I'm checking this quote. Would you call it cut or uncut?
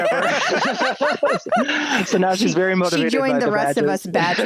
uncut